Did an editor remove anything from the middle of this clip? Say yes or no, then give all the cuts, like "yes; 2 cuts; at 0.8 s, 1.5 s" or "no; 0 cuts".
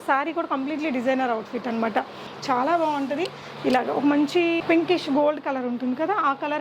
yes; 1 cut; at 2.3 s